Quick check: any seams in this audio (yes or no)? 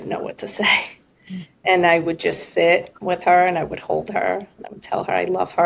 no